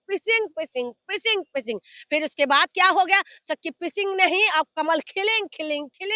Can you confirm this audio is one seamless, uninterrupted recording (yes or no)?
yes